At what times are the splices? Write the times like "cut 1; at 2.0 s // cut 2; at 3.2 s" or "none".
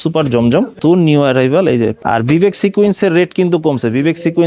cut 1; at 0.8 s // cut 2; at 2.0 s